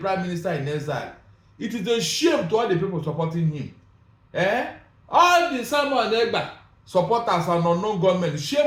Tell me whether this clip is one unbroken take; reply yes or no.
yes